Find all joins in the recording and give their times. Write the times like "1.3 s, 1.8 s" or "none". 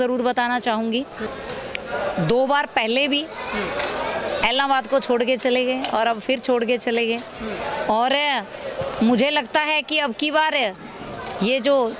1.2 s